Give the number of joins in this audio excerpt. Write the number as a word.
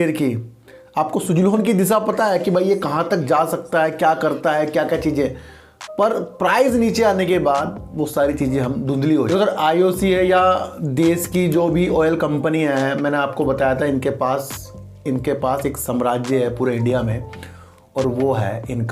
one